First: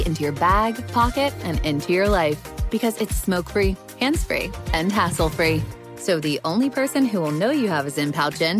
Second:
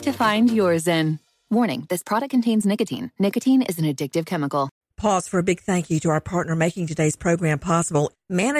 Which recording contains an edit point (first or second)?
second